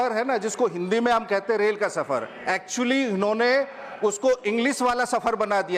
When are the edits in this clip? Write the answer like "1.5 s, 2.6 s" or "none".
none

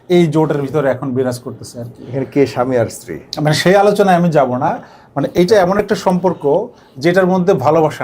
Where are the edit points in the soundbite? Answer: none

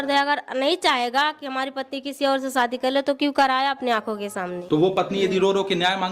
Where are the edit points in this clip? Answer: 4.6 s

